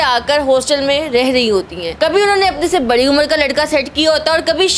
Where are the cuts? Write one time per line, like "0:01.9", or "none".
0:01.8

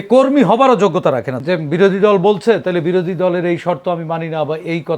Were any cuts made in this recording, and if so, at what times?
0:01.3

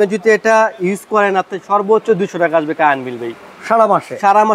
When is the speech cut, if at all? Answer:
none

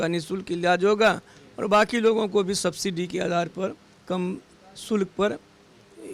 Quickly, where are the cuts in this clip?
none

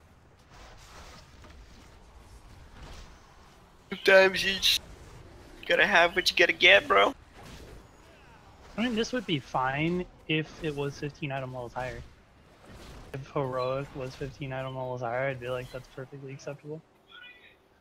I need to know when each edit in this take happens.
0:01.4

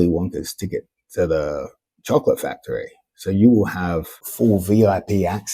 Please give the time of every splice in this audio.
0:04.2

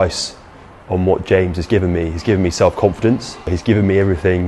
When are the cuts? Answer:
0:03.5

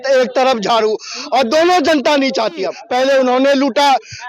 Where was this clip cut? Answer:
0:02.8

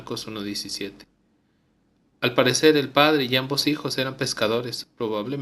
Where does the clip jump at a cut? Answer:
0:03.3

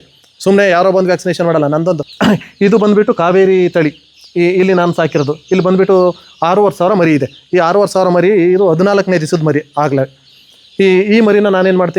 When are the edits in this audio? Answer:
0:02.1

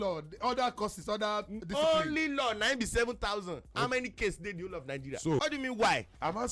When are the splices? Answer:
0:05.4

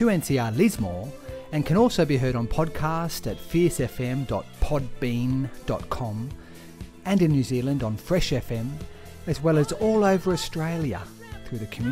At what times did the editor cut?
none

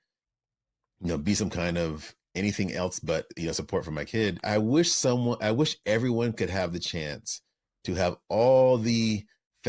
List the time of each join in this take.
0:04.4

